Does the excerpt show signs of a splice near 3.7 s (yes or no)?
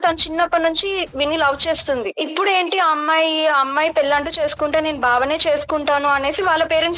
no